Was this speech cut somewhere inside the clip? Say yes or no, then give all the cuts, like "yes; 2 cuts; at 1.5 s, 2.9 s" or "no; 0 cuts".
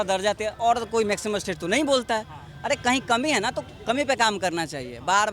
no; 0 cuts